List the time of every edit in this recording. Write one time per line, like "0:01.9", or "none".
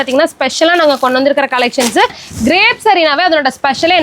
0:02.2